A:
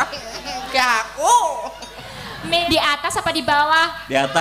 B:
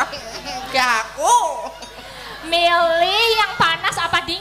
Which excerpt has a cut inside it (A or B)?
A